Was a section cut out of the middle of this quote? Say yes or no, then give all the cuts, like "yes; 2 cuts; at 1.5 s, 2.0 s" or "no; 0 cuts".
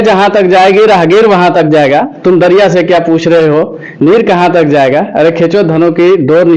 no; 0 cuts